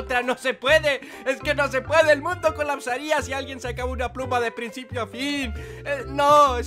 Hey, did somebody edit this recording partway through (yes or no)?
yes